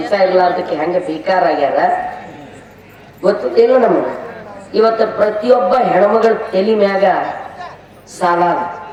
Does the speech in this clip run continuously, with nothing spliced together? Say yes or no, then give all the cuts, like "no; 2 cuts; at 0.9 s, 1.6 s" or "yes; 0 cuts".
yes; 0 cuts